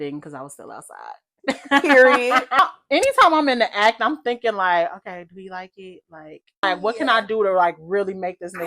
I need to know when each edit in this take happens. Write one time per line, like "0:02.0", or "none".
0:02.6
0:06.6